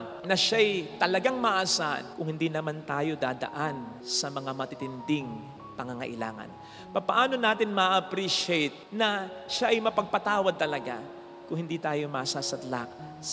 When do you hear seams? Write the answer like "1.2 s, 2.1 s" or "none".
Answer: none